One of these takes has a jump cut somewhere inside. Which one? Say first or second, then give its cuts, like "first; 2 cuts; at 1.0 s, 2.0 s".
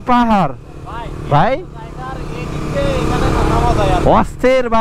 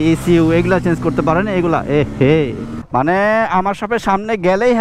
second; 1 cut; at 2.8 s